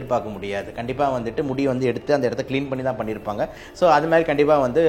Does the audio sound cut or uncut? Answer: cut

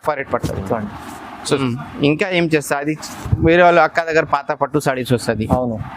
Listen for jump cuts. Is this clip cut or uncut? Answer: cut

